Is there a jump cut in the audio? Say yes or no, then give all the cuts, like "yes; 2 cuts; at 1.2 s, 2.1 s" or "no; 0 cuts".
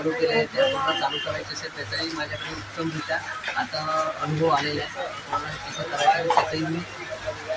no; 0 cuts